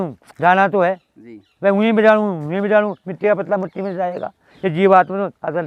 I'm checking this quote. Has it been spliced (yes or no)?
no